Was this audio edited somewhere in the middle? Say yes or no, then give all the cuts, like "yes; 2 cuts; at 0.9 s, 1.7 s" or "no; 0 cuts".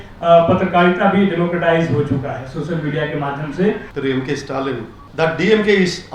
yes; 2 cuts; at 3.9 s, 5.0 s